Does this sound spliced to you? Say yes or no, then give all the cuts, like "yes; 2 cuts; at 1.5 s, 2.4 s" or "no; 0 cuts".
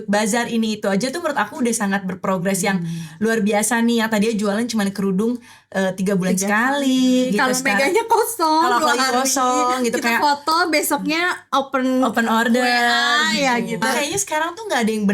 yes; 1 cut; at 13.8 s